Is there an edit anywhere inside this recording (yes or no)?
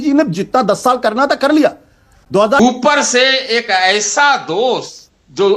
yes